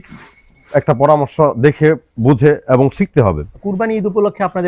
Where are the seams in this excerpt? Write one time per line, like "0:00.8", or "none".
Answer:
0:03.5